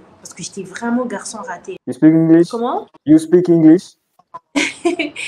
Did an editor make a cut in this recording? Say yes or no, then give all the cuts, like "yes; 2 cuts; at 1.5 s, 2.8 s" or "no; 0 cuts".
yes; 1 cut; at 1.7 s